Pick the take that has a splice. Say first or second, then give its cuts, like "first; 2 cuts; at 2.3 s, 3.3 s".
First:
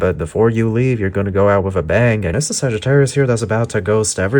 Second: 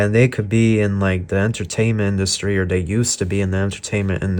first; 1 cut; at 2.3 s